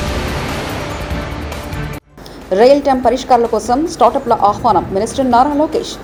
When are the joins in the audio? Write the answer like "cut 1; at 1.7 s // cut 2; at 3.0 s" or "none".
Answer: none